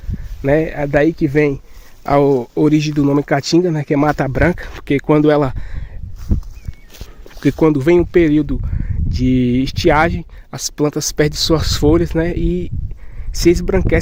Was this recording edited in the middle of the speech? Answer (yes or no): no